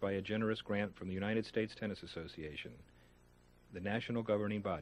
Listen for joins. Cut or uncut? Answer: uncut